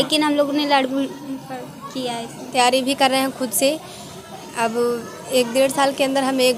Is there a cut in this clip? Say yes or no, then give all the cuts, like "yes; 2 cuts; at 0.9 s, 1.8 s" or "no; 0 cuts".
yes; 1 cut; at 2.5 s